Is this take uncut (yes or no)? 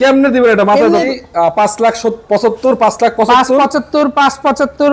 no